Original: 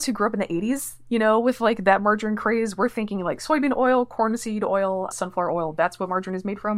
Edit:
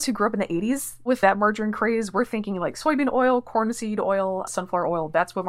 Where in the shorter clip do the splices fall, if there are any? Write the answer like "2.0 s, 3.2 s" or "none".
1.1 s